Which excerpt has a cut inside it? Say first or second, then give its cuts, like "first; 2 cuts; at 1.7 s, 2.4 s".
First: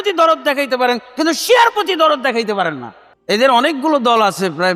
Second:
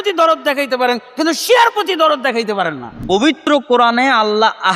second; 1 cut; at 3.3 s